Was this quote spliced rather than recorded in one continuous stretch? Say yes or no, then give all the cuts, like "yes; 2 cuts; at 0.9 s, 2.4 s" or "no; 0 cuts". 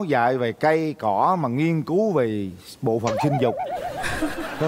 no; 0 cuts